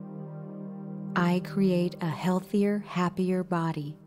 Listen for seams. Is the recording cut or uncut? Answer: cut